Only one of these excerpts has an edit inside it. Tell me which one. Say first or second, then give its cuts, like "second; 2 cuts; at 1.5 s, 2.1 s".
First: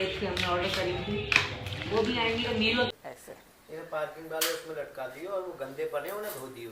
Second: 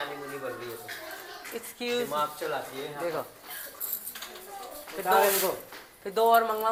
first; 1 cut; at 2.9 s